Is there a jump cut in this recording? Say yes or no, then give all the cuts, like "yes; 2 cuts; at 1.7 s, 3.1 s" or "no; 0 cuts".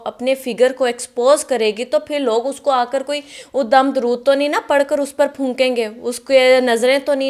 no; 0 cuts